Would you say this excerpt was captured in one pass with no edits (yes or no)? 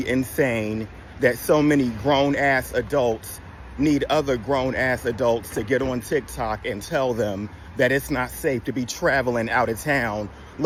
yes